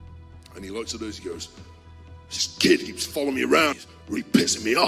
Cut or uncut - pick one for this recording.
cut